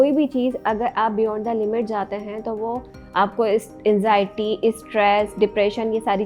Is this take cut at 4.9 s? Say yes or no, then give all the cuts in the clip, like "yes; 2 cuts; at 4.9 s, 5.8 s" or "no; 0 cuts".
no; 0 cuts